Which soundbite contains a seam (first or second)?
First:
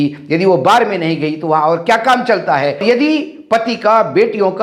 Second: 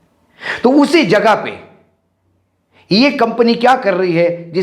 first